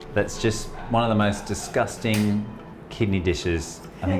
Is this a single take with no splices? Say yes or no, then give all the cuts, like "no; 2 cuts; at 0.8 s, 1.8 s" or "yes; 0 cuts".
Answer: yes; 0 cuts